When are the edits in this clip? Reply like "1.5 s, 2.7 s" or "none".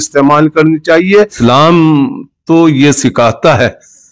1.3 s

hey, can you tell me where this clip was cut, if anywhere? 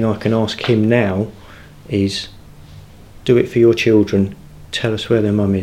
none

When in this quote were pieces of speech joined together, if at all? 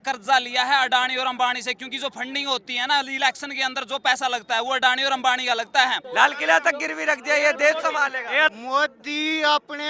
6.0 s, 8.5 s

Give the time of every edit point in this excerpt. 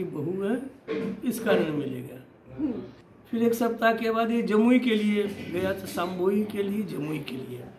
3.0 s

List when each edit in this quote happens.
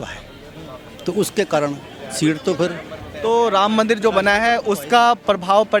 none

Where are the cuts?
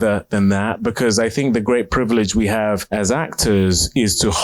2.8 s

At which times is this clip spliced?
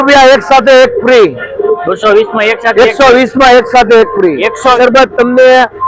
4.8 s

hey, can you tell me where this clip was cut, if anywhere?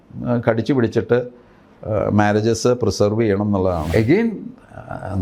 3.9 s

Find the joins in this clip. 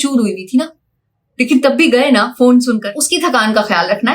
2.8 s

